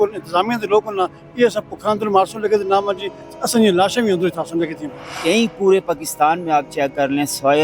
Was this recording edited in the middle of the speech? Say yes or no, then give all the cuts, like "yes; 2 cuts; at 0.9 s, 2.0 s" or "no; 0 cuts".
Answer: yes; 1 cut; at 5.2 s